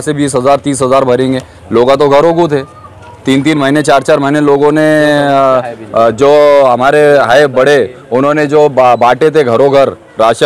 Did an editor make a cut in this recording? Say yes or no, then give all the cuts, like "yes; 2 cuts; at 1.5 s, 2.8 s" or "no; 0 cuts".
no; 0 cuts